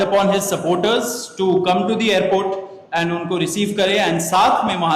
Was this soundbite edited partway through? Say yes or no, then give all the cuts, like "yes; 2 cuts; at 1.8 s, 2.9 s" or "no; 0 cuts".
no; 0 cuts